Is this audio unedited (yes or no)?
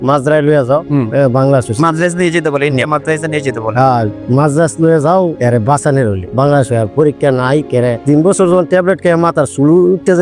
yes